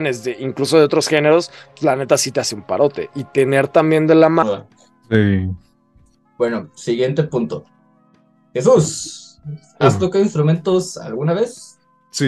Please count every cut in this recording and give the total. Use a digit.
1